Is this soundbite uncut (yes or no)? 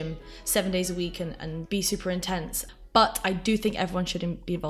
no